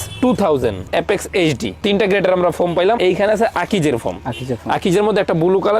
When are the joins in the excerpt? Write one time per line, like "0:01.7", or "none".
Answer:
0:00.9
0:03.0